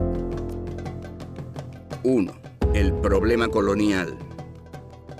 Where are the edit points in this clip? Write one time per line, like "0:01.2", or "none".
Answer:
0:03.8